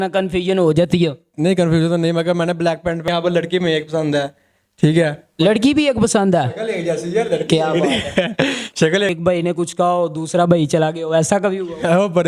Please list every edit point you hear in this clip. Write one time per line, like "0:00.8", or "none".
0:03.1
0:09.1